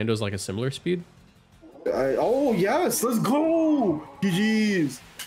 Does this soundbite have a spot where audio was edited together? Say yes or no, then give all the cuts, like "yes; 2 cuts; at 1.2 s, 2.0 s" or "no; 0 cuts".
no; 0 cuts